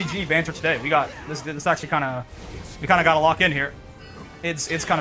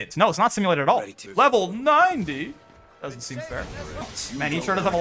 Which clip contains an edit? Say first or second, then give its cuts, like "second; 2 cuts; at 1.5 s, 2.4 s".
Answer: second; 2 cuts; at 1.2 s, 4.2 s